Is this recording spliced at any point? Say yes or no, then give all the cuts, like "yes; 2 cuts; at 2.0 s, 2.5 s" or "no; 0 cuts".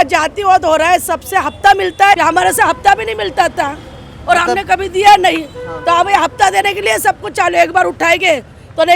yes; 1 cut; at 2.2 s